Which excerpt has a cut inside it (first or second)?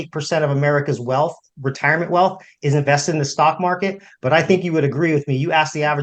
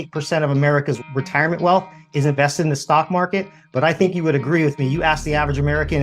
second